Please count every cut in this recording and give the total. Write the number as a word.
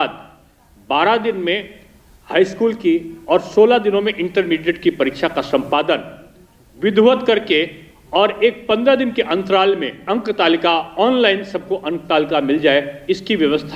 one